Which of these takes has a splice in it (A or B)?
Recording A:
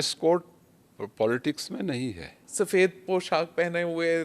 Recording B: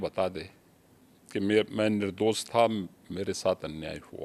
A